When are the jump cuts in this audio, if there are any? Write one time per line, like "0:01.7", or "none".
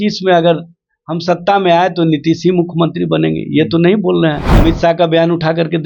0:04.5

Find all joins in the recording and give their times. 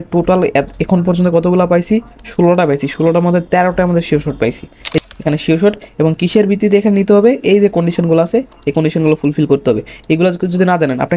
0:05.0

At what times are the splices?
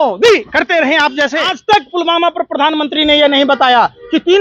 0:01.5

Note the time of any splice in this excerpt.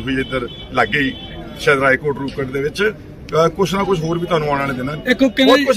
none

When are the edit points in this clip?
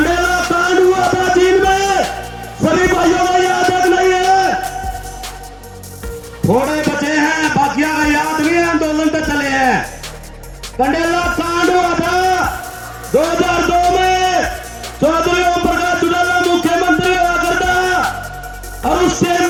none

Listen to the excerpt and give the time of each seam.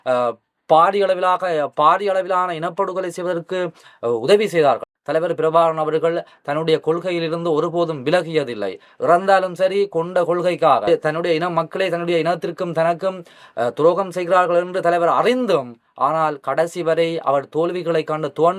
0:04.9
0:10.8

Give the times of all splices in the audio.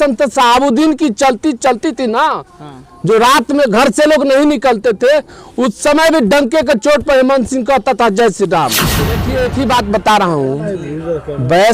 0:09.2

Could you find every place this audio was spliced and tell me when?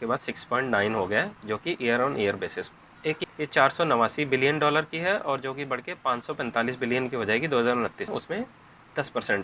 0:03.2
0:08.1

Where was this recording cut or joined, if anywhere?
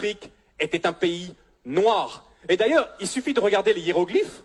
none

